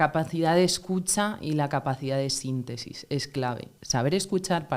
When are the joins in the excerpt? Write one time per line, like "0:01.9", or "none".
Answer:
0:03.7